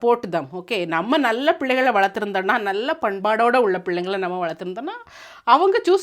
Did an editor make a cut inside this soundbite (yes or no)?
no